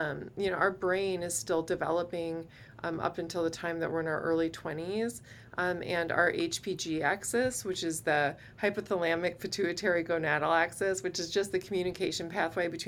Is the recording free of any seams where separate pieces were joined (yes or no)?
yes